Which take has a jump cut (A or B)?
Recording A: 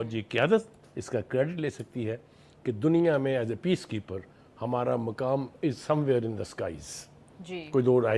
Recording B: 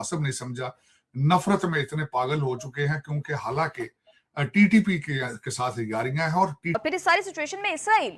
B